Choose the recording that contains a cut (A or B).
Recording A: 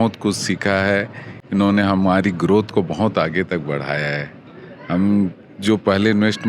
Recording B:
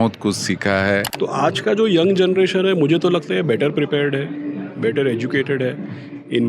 B